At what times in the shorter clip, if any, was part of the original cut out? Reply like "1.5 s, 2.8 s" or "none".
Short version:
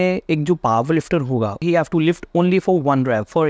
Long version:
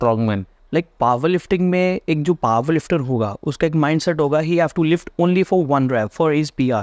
1.6 s